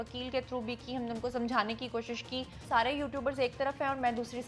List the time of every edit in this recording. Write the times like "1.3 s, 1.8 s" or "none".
2.6 s

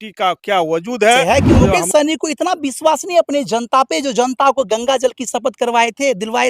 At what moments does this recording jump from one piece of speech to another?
1.2 s

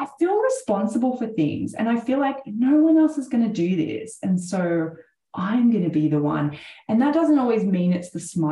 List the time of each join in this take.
none

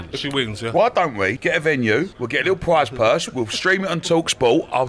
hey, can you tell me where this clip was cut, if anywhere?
1.4 s, 2.2 s

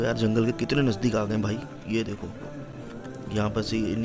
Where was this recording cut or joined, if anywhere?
none

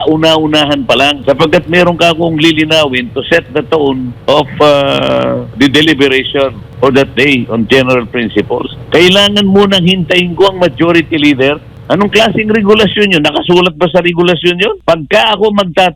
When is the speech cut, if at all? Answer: 1.2 s, 4.1 s, 5.5 s, 6.6 s, 8.8 s, 11.7 s, 14.8 s

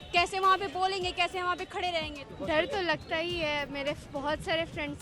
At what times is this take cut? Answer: 2.2 s

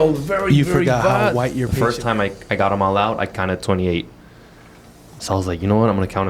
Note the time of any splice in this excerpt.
1.7 s

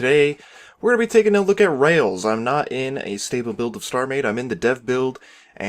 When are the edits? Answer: 4.1 s

